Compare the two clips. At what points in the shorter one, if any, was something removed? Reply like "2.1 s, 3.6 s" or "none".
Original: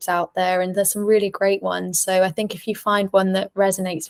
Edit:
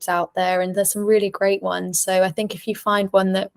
none